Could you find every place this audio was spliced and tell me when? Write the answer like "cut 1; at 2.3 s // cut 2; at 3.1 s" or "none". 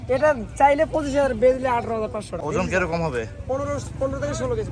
cut 1; at 2.4 s